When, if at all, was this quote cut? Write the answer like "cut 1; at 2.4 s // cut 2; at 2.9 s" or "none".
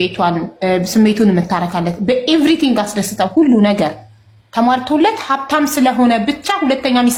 none